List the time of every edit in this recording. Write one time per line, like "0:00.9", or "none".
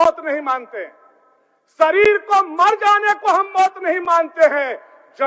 none